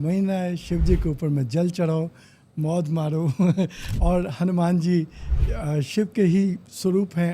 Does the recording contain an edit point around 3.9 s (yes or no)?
yes